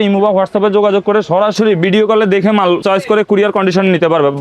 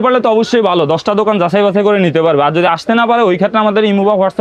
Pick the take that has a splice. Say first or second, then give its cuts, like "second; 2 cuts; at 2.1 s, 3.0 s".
first; 2 cuts; at 1.5 s, 2.8 s